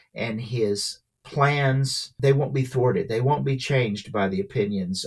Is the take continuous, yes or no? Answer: no